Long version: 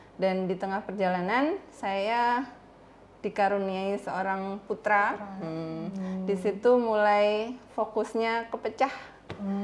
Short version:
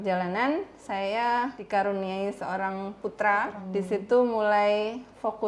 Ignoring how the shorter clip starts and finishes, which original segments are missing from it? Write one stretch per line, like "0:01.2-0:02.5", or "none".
0:02.5-0:03.2
0:05.3-0:06.2